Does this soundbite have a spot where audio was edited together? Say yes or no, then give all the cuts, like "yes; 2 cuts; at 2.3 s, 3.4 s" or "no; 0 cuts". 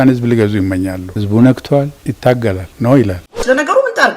yes; 3 cuts; at 1.1 s, 2.0 s, 3.2 s